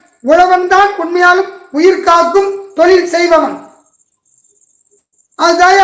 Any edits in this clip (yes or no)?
no